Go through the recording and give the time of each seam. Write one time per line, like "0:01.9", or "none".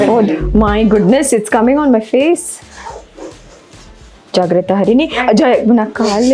none